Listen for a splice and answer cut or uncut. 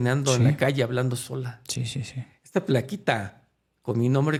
uncut